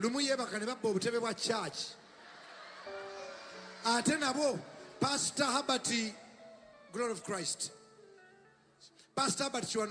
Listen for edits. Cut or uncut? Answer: uncut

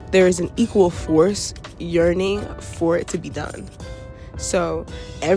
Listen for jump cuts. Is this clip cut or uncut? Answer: uncut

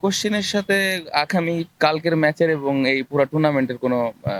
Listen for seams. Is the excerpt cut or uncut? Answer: uncut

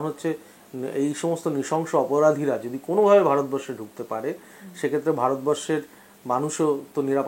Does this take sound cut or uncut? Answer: uncut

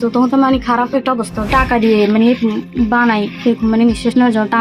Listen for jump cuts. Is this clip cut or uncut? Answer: cut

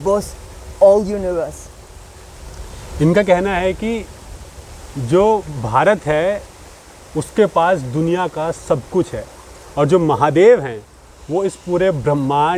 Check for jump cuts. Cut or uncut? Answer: uncut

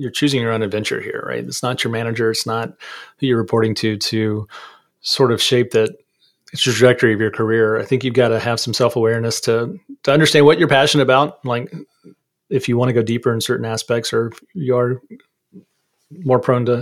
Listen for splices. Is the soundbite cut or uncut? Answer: uncut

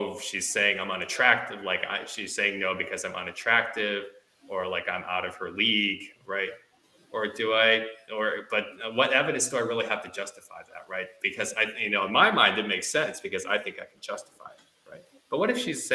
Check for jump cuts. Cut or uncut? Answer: uncut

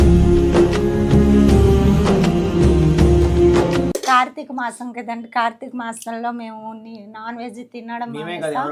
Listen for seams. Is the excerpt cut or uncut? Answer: uncut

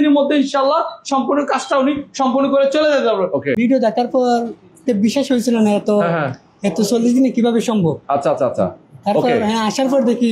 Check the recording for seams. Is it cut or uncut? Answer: cut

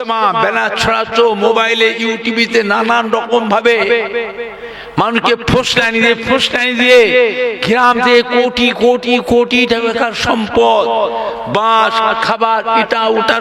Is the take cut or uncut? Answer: uncut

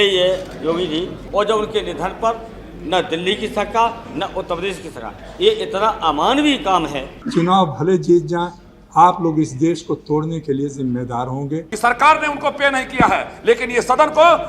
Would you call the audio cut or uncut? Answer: cut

